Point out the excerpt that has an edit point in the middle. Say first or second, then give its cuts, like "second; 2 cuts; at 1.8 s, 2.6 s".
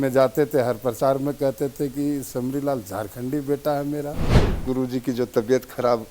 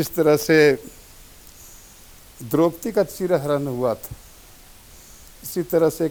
first; 1 cut; at 4.5 s